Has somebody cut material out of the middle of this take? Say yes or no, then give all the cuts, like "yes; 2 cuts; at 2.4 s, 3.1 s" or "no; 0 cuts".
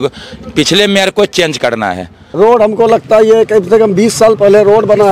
yes; 1 cut; at 2.2 s